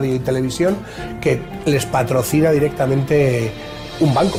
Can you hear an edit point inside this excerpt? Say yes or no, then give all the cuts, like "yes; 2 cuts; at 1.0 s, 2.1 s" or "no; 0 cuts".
no; 0 cuts